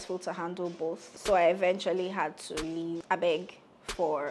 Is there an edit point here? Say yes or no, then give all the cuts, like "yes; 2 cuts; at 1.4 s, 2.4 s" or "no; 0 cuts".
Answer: yes; 2 cuts; at 1.1 s, 3.0 s